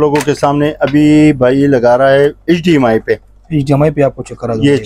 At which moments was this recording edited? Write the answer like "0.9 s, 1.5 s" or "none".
none